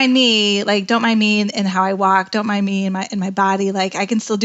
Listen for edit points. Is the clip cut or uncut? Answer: uncut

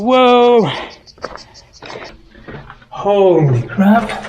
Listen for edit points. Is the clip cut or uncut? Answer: cut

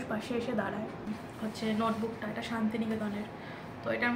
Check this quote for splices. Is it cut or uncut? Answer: cut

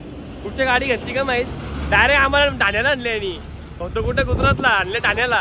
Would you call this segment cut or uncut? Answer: uncut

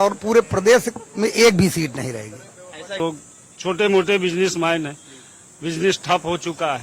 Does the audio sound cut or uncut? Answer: cut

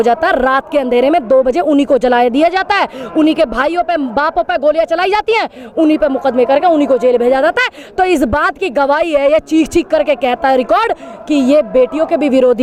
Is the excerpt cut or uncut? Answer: uncut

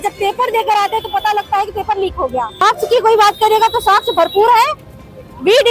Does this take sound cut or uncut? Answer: cut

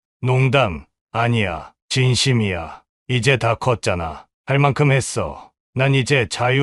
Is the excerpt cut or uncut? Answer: uncut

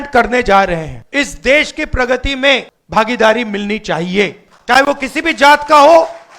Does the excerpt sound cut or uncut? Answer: cut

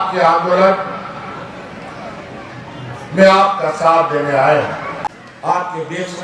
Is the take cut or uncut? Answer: cut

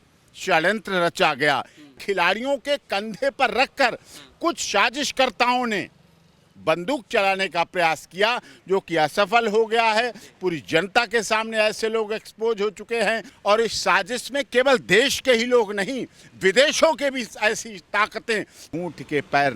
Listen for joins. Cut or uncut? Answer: cut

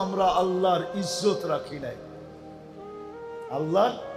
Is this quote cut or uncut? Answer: uncut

